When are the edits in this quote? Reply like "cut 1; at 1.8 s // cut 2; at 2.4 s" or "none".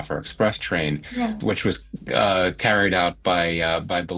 cut 1; at 1.4 s